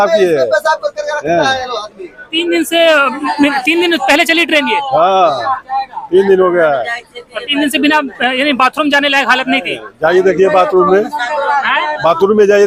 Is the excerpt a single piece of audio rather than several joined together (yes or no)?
yes